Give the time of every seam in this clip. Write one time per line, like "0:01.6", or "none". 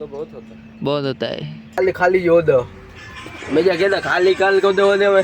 0:01.8